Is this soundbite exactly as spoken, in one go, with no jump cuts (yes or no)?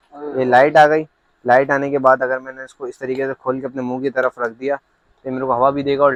yes